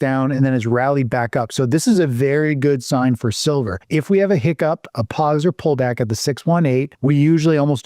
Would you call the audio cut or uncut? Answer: cut